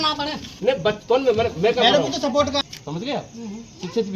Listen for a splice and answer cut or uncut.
cut